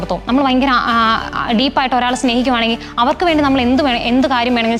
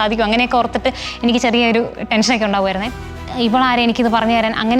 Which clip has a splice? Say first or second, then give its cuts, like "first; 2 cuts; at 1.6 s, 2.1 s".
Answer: second; 1 cut; at 3.1 s